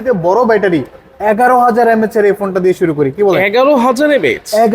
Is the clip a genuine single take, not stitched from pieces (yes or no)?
yes